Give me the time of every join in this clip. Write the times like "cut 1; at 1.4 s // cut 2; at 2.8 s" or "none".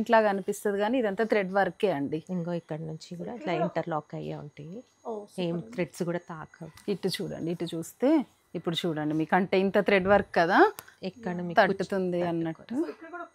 none